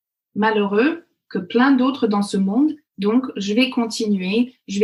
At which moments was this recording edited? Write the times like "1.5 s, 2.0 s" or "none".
none